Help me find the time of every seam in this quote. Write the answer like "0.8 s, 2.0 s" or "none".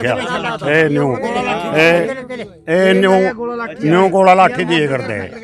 none